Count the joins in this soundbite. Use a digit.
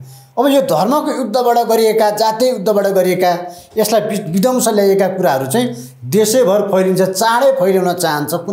0